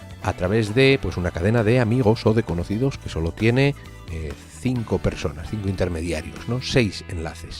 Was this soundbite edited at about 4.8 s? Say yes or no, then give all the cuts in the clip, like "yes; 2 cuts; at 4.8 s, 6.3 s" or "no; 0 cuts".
no; 1 cut; at 1.5 s